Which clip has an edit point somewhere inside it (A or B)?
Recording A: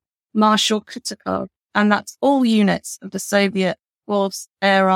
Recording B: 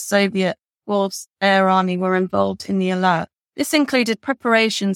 B